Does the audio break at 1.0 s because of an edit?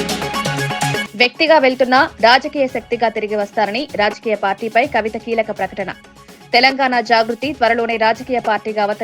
yes; 1 cut; at 1.0 s

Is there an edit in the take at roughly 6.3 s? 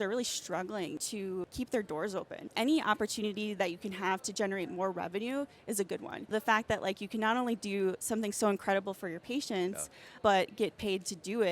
yes; 4 cuts; at 1.1 s, 2.4 s, 6.3 s, 10.1 s

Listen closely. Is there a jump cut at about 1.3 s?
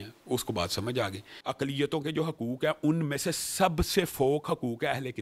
yes; 1 cut; at 1.3 s

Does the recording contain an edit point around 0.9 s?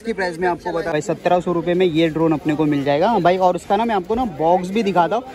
yes; 1 cut; at 0.9 s

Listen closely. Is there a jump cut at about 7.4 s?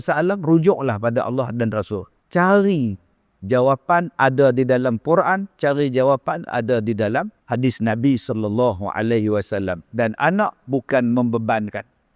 yes; 2 cuts; at 2.1 s, 7.4 s

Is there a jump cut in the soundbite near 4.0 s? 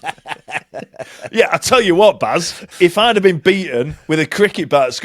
no; 1 cut; at 2.6 s

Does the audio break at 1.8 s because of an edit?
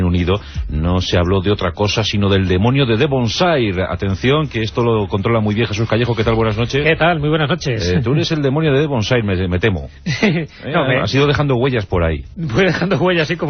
no; 1 cut; at 11.2 s

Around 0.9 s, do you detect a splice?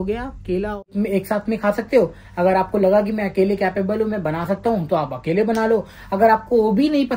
yes; 1 cut; at 0.9 s

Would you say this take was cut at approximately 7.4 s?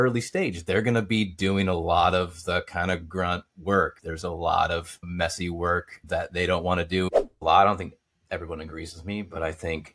yes; 2 cuts; at 4.0 s, 7.4 s

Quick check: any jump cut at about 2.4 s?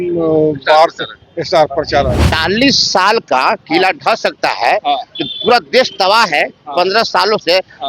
yes; 1 cut; at 2.4 s

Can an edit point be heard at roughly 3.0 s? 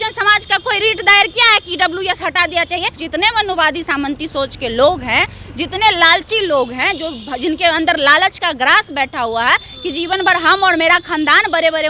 yes; 1 cut; at 3.0 s

